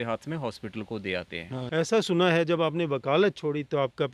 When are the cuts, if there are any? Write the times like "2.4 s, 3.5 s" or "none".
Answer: 1.5 s